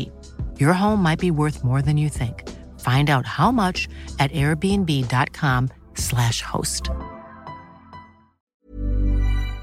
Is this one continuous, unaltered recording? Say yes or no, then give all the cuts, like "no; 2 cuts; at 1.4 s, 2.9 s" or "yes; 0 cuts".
no; 1 cut; at 8.6 s